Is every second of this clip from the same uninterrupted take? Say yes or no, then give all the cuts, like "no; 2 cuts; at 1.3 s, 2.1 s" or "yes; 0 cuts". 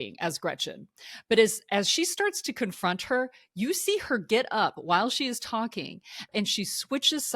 no; 1 cut; at 6.3 s